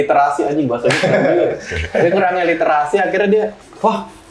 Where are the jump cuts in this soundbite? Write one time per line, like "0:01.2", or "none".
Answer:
none